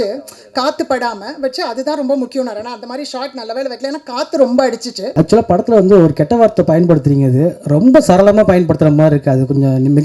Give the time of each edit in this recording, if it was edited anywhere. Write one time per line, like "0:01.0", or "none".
0:05.0